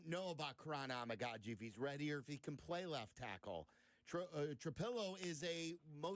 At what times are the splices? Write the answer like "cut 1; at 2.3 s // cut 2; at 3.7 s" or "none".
none